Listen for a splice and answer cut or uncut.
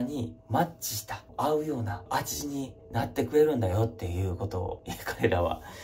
uncut